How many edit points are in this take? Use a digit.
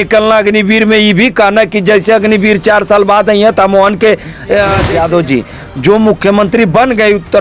1